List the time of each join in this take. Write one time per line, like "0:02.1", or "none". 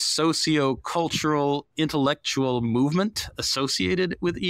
none